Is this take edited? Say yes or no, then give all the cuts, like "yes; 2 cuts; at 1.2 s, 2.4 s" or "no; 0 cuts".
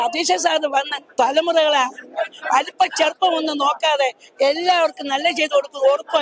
no; 0 cuts